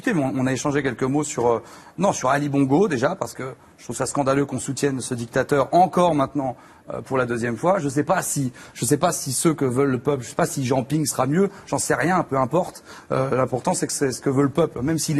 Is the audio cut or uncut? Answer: cut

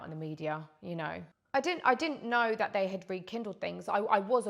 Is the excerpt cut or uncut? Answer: cut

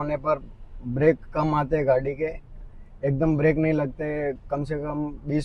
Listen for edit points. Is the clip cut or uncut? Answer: uncut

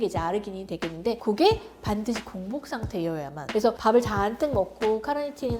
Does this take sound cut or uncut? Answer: uncut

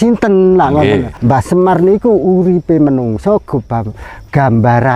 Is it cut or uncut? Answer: cut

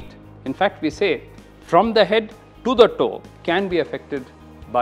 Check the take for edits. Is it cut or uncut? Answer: cut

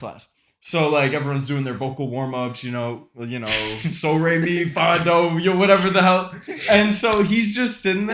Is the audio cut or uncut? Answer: uncut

